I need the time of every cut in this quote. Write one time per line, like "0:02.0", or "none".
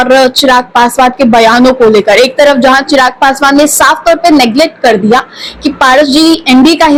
none